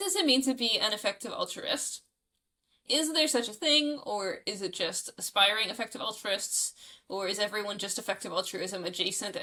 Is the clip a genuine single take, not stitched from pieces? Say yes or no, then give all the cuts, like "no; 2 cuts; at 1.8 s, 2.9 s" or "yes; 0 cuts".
yes; 0 cuts